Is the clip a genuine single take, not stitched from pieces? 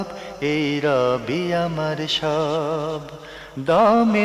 no; 1 cut; at 2.9 s

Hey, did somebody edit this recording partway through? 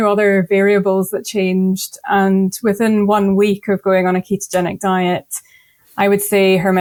no; 0 cuts

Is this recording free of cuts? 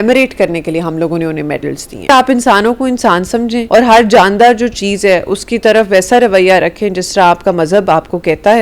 no; 2 cuts; at 2.1 s, 3.6 s

